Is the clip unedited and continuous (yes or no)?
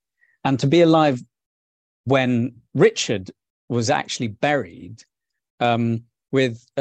yes